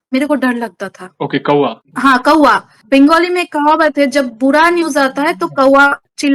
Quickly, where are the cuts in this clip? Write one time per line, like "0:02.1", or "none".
none

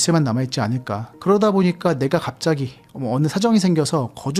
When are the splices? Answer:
0:01.2

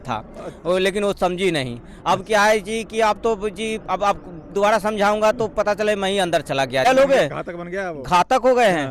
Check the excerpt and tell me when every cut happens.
0:06.8

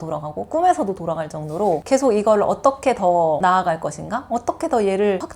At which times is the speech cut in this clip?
none

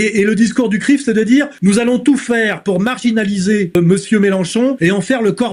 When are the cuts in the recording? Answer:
0:01.5
0:03.7
0:04.8

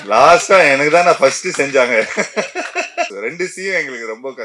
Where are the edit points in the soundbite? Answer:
0:03.1

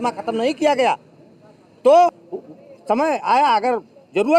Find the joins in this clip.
0:02.1

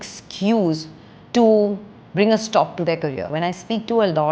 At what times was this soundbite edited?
0:03.3

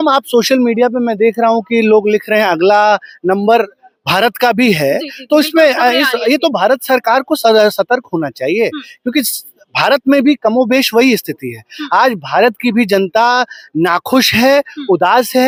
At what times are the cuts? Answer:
none

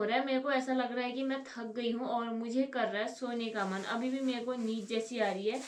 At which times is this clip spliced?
none

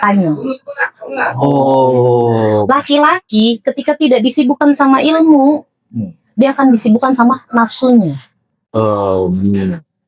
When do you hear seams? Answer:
none

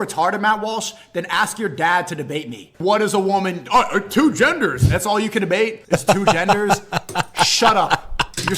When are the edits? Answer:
0:02.7
0:05.8

